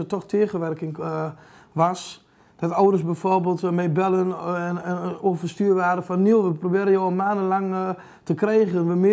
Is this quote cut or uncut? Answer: uncut